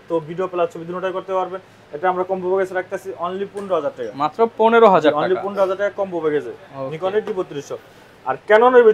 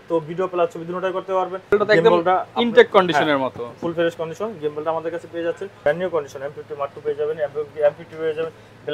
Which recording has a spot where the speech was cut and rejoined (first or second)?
second